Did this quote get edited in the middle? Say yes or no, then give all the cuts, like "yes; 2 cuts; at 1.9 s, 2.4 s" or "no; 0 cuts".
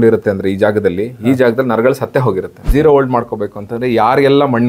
yes; 1 cut; at 2.5 s